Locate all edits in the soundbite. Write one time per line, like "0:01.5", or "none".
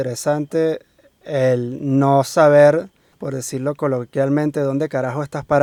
none